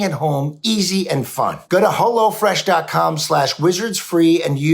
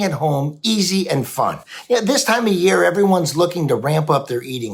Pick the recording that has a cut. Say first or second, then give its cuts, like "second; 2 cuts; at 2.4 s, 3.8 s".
first; 1 cut; at 1.6 s